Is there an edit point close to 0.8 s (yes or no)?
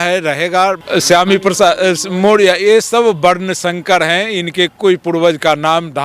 yes